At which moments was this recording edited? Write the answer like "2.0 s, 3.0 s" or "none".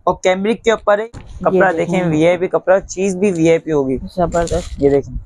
1.1 s

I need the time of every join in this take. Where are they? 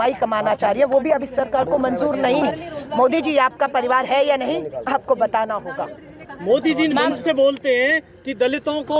none

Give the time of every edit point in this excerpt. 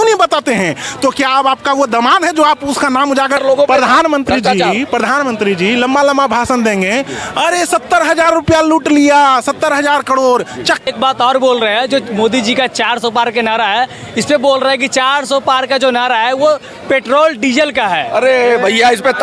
3.4 s, 10.8 s

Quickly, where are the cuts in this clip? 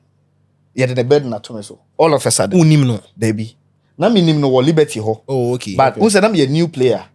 none

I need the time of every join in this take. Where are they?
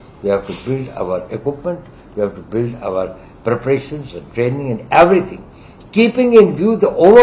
none

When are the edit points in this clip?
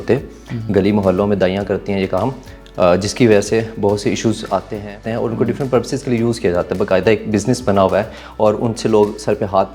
5.1 s

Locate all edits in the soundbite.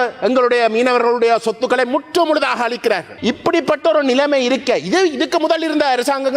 3.1 s

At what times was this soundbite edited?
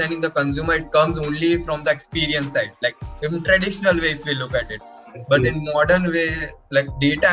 none

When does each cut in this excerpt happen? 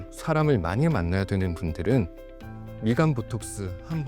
none

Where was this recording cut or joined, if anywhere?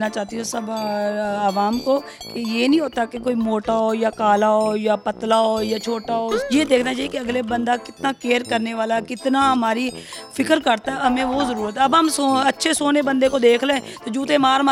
none

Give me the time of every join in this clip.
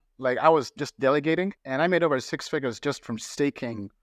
1.6 s

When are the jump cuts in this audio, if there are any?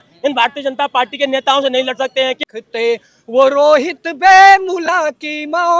2.4 s

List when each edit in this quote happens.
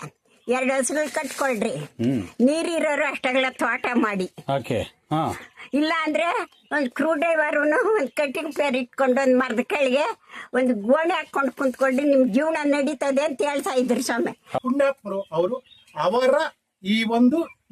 14.5 s

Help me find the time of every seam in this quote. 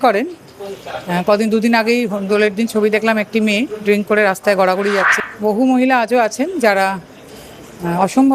5.1 s

